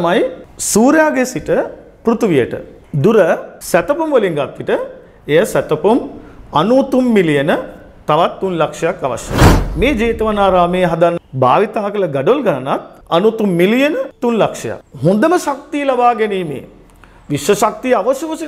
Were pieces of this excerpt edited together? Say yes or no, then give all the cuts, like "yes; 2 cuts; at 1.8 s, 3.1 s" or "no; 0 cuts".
yes; 3 cuts; at 3.5 s, 11.2 s, 14.8 s